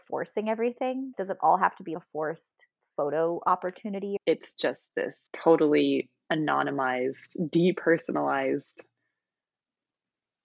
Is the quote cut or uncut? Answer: cut